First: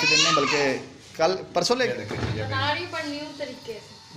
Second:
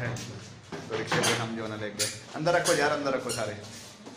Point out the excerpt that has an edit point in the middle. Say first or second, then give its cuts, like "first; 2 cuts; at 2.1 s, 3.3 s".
first; 1 cut; at 1.9 s